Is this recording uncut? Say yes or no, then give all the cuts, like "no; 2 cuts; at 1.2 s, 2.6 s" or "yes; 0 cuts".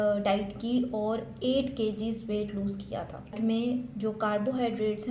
no; 1 cut; at 3.3 s